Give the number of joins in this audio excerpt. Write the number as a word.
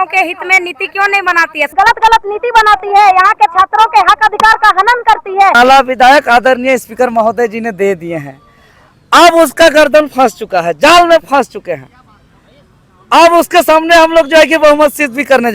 two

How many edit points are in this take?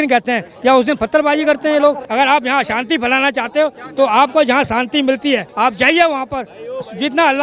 two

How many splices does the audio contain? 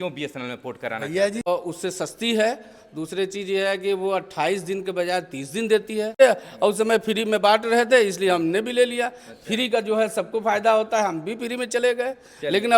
two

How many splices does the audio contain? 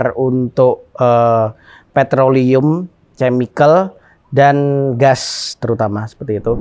zero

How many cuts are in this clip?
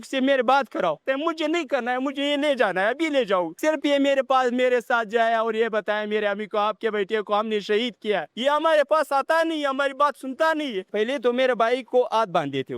four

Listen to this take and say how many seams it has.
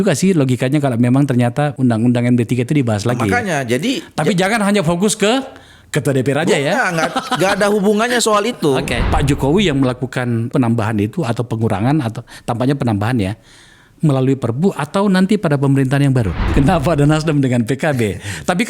two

